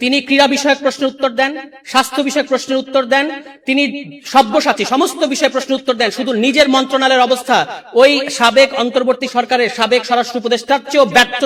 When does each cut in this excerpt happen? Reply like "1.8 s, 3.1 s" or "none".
none

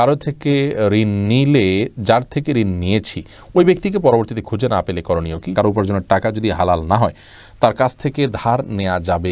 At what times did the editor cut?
5.5 s

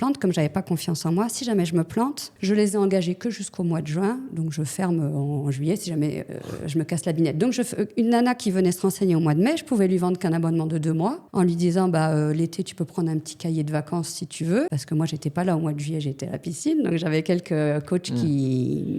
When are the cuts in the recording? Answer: 2.3 s, 11.2 s, 14.8 s

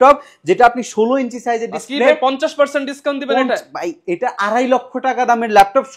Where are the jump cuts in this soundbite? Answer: none

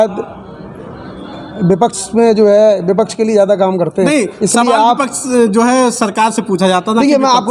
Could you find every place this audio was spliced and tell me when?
none

